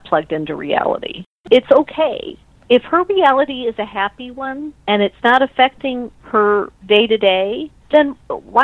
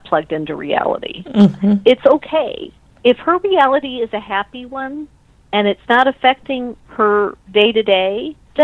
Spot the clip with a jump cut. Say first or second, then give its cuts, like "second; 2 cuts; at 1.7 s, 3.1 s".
first; 2 cuts; at 1.4 s, 4.7 s